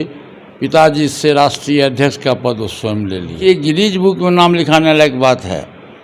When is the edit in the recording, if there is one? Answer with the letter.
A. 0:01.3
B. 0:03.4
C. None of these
B